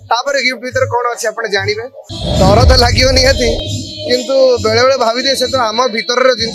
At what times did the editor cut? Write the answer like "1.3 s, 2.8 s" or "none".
2.0 s